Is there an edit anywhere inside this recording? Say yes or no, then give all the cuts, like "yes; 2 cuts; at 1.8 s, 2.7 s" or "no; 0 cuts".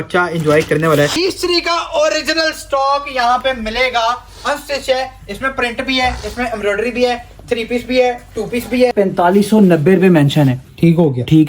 yes; 2 cuts; at 1.1 s, 8.9 s